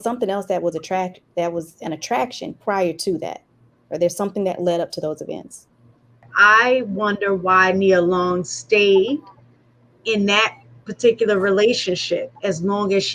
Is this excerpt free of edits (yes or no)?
no